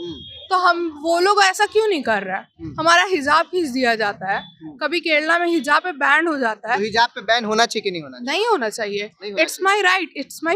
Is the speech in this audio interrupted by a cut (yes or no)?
no